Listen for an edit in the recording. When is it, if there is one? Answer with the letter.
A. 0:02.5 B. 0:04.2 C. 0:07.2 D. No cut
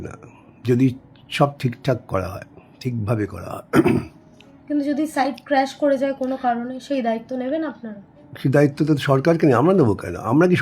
D